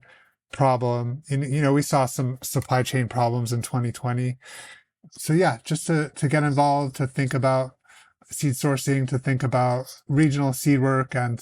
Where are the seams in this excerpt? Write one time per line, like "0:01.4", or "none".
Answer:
none